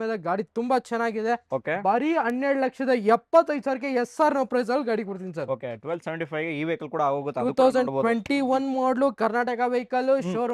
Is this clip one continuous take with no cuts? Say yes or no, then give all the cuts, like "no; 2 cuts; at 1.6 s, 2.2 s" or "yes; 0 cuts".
yes; 0 cuts